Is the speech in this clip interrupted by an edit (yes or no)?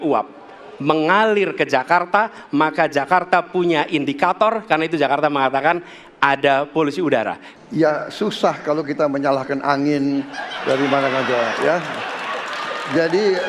yes